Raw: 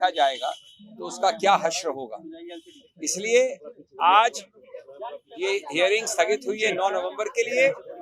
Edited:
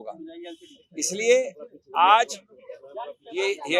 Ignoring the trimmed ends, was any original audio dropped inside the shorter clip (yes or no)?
no